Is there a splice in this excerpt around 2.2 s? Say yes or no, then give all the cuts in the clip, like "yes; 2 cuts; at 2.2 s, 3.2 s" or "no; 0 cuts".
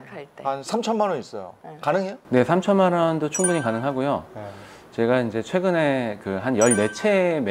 yes; 1 cut; at 2.2 s